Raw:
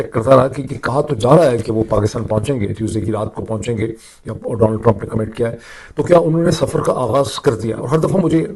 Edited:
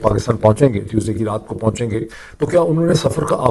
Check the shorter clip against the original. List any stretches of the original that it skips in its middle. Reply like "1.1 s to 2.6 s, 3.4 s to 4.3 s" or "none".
4.1 s to 5.8 s